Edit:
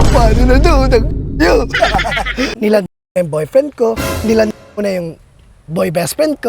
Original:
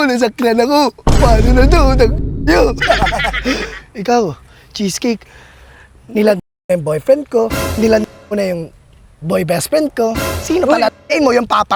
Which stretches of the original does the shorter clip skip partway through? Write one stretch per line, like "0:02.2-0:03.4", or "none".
0:03.6-0:06.1